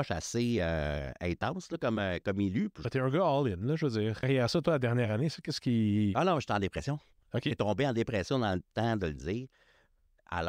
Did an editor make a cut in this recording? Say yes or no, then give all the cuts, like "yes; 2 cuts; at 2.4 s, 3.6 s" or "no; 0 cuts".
yes; 1 cut; at 4.2 s